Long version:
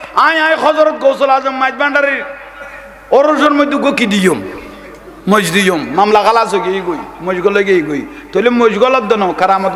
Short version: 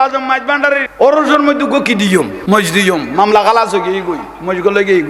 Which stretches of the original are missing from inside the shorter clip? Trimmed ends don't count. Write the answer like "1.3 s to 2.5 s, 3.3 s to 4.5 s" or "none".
2.2 s to 3.0 s, 4.5 s to 5.2 s

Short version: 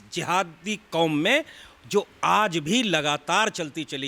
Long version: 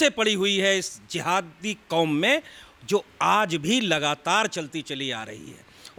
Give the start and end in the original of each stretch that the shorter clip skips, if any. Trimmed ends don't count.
none

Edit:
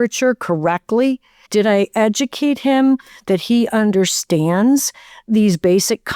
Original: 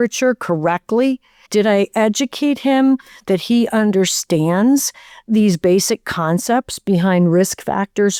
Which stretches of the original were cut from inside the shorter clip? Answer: none

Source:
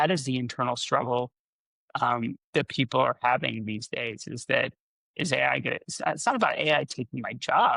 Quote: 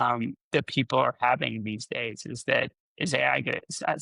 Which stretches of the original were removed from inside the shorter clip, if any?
4.8 s to 5.0 s

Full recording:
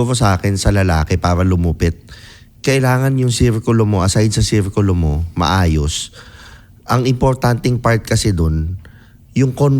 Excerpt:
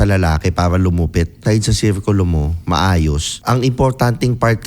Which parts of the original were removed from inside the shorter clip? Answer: 2.1 s to 4.1 s, 6.0 s to 6.7 s

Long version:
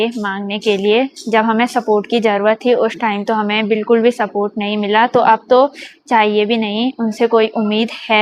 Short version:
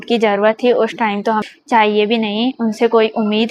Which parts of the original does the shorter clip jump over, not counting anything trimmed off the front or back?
3.5 s to 5.8 s

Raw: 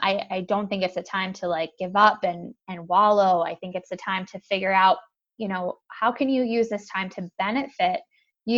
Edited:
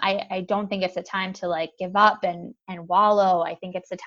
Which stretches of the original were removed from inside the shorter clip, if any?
none

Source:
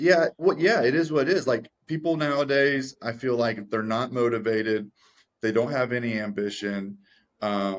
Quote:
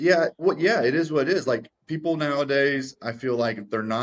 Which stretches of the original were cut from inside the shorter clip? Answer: none

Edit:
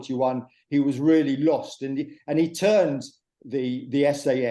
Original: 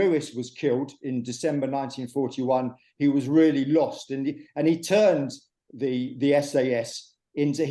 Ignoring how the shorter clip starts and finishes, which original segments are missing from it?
none

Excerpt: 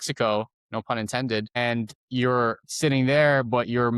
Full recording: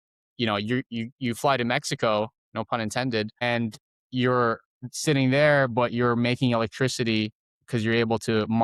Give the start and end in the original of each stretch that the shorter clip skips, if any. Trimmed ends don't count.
3.8 s to 4.0 s, 4.7 s to 4.9 s

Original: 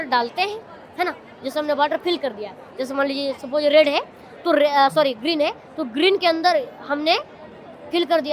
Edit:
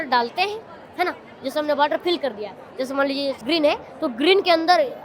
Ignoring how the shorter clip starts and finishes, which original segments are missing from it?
3.4 s to 5.2 s

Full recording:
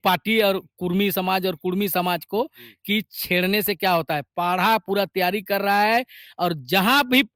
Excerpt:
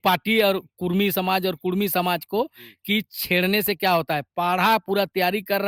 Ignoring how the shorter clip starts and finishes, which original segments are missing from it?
none

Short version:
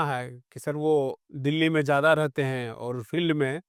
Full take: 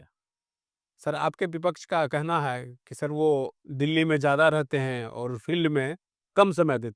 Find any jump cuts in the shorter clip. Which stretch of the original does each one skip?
none

